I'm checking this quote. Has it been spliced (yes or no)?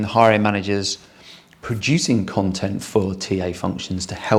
no